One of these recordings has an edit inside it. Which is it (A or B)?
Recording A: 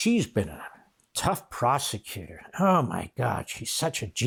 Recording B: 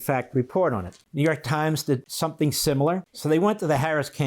B